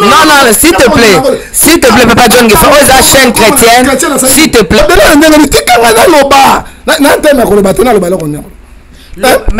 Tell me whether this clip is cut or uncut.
cut